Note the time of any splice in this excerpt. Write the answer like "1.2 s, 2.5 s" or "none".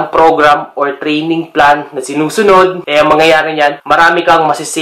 2.8 s, 3.8 s

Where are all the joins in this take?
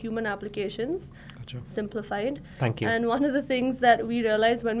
none

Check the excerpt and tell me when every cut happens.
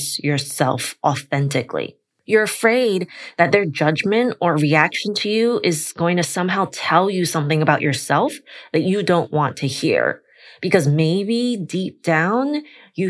none

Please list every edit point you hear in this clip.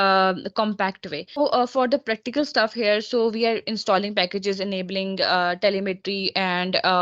1.4 s

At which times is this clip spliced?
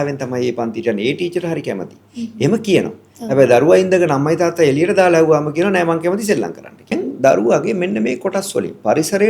6.9 s

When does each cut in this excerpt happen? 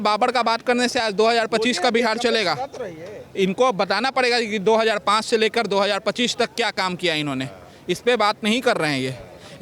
none

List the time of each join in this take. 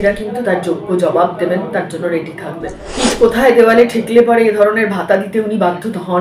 2.8 s

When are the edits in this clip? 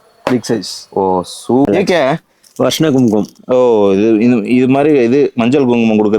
1.7 s

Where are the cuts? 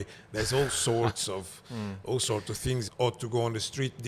2.9 s

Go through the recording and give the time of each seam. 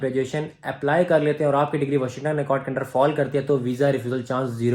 none

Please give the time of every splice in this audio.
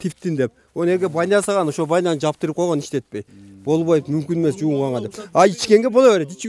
none

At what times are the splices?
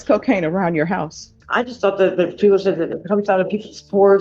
1.3 s

